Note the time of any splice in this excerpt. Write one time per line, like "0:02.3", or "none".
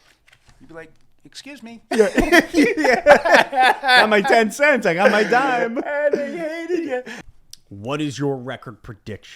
0:07.2

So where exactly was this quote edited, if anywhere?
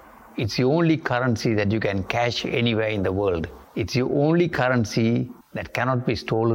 0:03.6

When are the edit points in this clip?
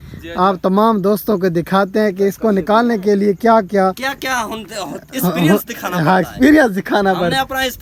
none

